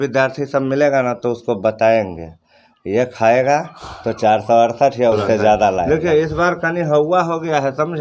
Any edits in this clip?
yes; 1 cut; at 5.9 s

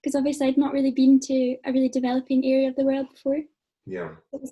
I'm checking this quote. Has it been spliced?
no; 0 cuts

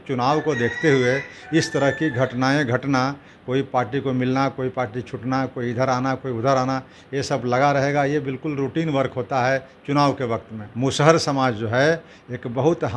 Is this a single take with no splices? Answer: no; 1 cut; at 10.6 s

